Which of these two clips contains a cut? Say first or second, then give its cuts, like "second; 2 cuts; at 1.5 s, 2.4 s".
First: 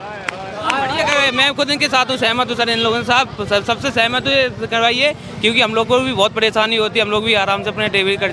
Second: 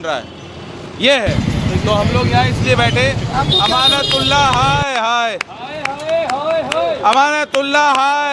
first; 1 cut; at 1.0 s